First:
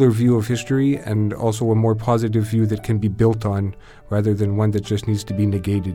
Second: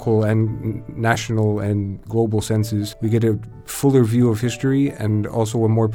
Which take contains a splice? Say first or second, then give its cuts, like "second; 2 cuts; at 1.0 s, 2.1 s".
second; 2 cuts; at 2.0 s, 2.9 s